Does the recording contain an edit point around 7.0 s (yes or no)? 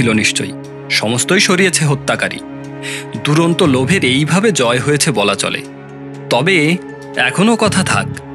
yes